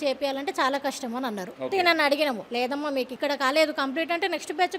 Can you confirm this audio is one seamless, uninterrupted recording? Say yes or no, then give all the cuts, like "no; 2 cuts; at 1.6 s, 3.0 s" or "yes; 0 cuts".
no; 2 cuts; at 1.5 s, 2.7 s